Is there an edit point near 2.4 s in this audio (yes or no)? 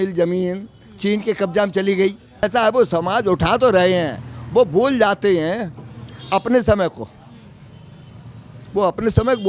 yes